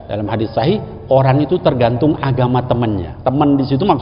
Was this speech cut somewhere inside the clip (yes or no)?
yes